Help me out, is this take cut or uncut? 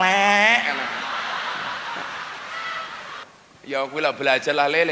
cut